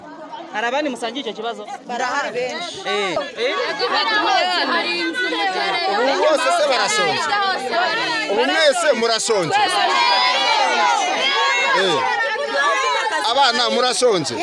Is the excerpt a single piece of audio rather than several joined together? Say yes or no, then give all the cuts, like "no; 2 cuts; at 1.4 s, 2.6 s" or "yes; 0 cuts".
no; 1 cut; at 3.2 s